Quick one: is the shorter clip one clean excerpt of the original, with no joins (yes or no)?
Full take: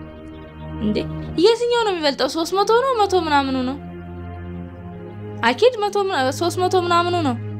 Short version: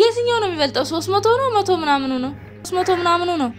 no